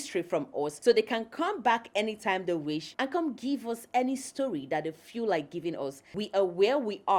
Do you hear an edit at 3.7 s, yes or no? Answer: no